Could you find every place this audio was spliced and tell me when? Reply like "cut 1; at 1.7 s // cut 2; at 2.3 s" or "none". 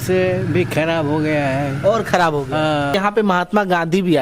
cut 1; at 2.9 s